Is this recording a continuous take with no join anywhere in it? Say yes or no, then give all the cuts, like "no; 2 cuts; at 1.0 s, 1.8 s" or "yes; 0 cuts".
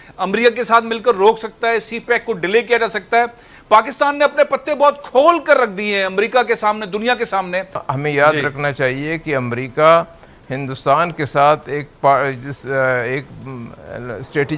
no; 1 cut; at 7.8 s